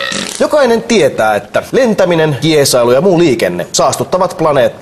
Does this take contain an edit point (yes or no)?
yes